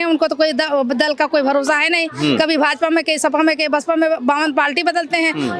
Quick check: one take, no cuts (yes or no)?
yes